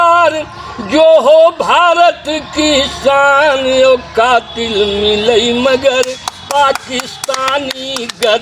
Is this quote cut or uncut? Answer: uncut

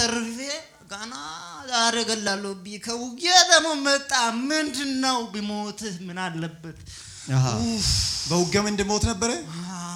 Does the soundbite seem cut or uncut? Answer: uncut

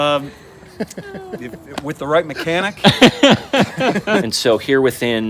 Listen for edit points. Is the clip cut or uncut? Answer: cut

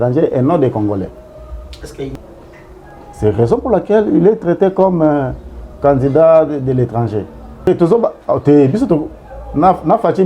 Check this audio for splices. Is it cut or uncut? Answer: cut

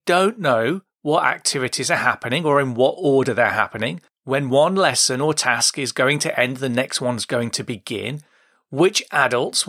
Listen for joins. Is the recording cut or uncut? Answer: uncut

